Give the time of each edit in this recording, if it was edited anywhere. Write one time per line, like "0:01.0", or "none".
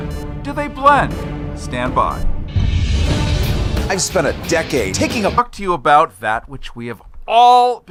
none